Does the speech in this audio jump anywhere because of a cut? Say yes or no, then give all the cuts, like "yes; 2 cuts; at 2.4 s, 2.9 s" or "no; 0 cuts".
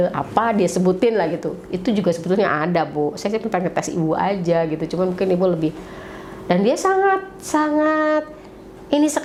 no; 0 cuts